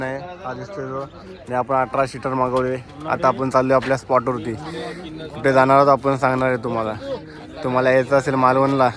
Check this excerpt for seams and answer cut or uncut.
uncut